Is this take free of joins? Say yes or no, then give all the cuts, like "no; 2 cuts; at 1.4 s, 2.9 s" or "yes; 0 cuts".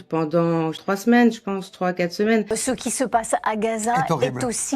no; 2 cuts; at 0.8 s, 2.5 s